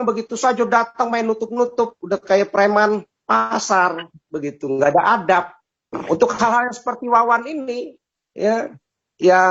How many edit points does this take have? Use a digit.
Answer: 1